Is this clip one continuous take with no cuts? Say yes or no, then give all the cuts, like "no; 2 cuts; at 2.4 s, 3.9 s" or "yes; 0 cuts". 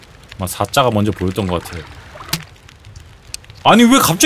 yes; 0 cuts